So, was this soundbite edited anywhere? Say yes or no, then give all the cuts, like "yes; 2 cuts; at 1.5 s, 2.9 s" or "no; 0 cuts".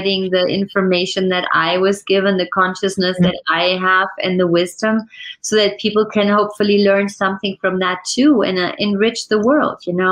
no; 0 cuts